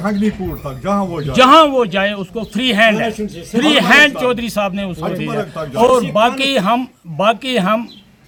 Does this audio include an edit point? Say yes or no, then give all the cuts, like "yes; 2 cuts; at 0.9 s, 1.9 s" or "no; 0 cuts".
no; 0 cuts